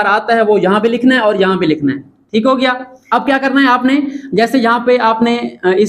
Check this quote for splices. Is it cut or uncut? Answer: cut